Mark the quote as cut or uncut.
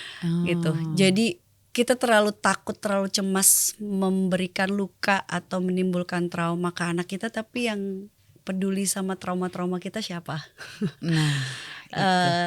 uncut